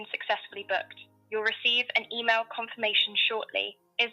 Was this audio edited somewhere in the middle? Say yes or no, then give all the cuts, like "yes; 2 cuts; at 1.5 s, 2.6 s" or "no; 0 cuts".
yes; 1 cut; at 1.1 s